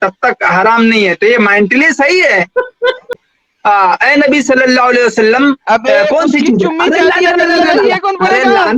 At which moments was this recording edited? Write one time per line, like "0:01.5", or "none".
0:03.1